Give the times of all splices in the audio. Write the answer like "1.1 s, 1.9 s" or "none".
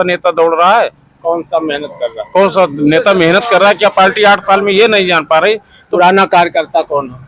none